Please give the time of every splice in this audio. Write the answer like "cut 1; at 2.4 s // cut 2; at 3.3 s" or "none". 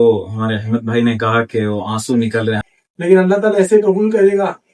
cut 1; at 2.6 s